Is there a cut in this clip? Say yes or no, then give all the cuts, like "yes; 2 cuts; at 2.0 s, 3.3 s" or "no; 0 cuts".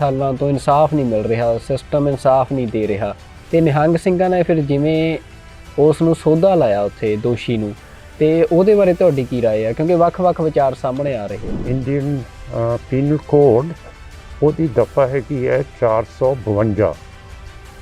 yes; 1 cut; at 11.6 s